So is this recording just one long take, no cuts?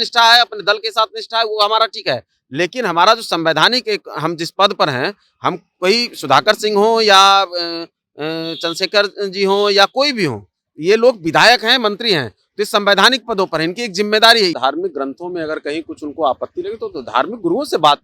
no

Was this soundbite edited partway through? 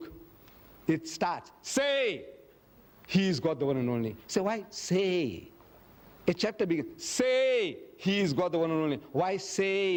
no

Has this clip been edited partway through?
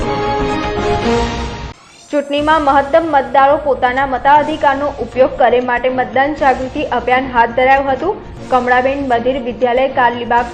yes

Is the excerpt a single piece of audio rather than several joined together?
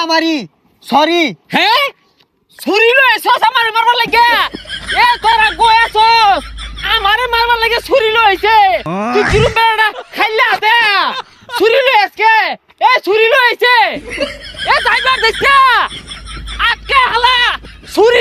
yes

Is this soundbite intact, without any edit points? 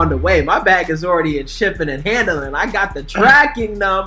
yes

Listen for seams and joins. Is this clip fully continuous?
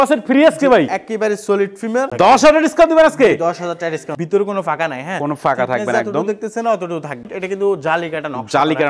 no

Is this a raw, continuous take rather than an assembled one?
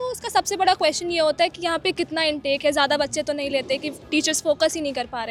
yes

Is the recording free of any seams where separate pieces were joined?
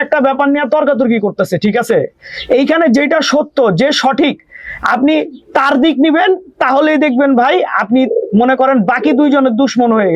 yes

